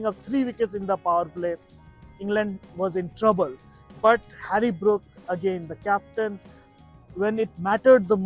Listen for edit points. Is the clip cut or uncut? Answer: uncut